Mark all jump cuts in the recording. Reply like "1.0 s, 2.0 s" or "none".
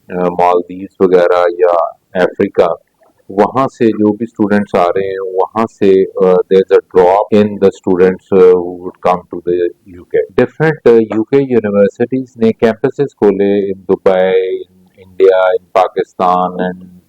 7.3 s, 10.3 s